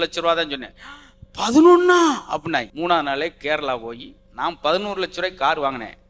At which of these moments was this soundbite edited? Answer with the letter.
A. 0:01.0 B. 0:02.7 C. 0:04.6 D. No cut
B